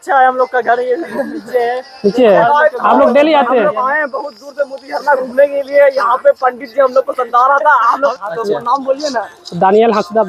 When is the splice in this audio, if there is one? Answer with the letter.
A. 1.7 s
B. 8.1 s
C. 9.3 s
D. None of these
B